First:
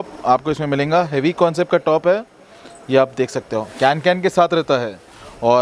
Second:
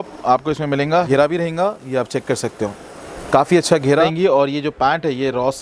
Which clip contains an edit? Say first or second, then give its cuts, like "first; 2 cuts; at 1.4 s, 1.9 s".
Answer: second; 2 cuts; at 1.1 s, 4.1 s